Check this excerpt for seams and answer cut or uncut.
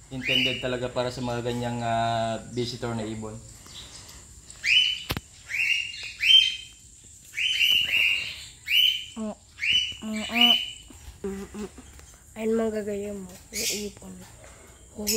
uncut